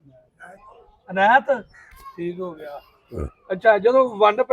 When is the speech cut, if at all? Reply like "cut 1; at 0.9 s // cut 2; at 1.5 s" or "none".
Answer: none